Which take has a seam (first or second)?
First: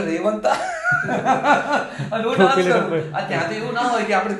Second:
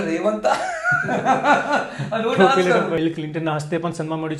second